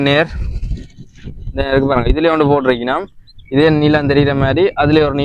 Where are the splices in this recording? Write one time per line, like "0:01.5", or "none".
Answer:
none